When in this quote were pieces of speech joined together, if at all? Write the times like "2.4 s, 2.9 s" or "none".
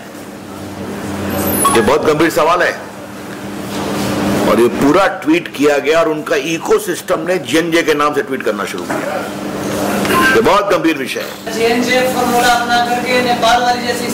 11.5 s